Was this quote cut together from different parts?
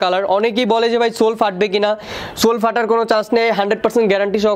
no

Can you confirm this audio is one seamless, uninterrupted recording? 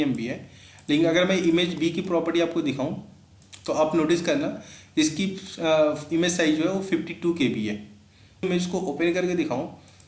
yes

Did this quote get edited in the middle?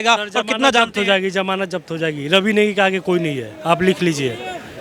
no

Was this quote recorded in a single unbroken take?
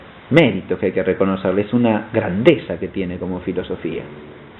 yes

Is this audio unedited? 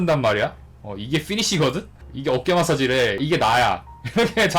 no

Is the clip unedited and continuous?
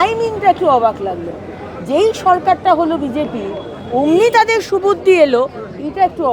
yes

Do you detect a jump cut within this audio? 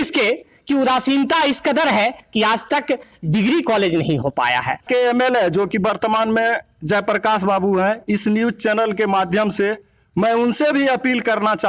yes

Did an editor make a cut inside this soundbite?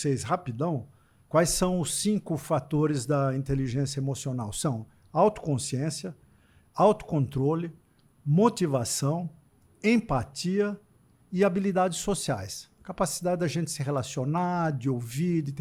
no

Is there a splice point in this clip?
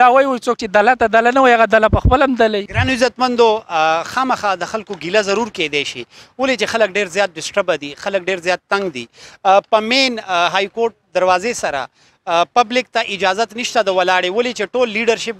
no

